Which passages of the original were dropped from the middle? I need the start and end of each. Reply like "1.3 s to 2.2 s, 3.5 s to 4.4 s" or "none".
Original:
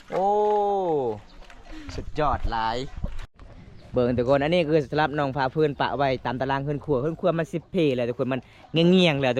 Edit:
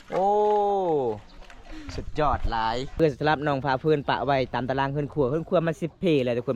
3.0 s to 4.7 s